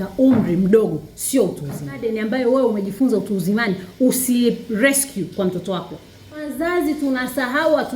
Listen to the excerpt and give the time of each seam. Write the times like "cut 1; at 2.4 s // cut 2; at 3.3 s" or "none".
cut 1; at 2.2 s // cut 2; at 6.5 s